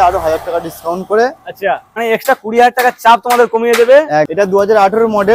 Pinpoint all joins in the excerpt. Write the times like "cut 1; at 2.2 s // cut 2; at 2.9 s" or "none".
cut 1; at 1.9 s // cut 2; at 4.3 s